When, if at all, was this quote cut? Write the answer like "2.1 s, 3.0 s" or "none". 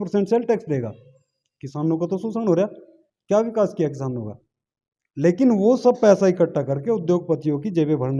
none